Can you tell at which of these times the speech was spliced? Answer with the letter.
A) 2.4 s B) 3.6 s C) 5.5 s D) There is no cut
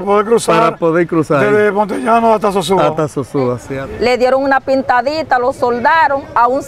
B